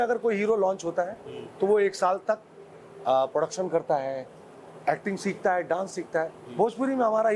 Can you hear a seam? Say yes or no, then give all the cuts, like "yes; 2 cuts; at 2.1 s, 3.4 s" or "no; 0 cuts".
no; 0 cuts